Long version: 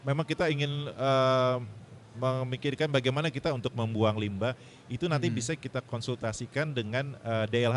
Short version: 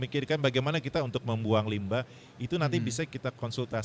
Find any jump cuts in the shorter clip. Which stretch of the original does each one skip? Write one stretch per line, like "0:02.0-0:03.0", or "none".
none